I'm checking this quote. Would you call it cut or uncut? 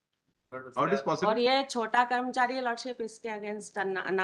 uncut